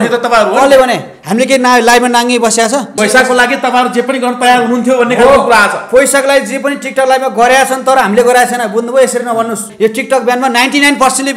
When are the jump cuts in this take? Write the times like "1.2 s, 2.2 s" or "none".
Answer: 2.9 s, 9.7 s